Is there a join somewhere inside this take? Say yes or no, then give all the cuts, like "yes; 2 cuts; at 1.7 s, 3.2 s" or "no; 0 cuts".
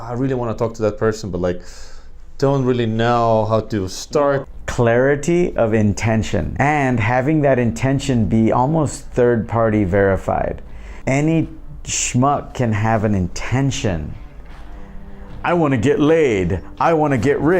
yes; 3 cuts; at 4.4 s, 6.5 s, 10.9 s